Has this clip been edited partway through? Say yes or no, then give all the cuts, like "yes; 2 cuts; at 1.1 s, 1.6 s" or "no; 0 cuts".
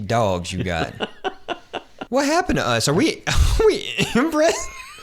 yes; 1 cut; at 1.9 s